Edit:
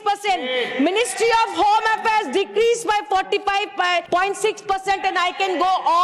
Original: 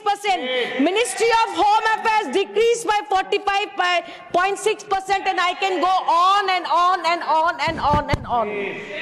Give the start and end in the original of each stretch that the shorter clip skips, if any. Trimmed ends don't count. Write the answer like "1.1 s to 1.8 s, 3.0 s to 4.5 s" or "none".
4.1 s to 4.3 s